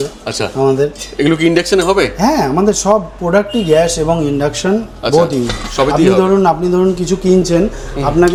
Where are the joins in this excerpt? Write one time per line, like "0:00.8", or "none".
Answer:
none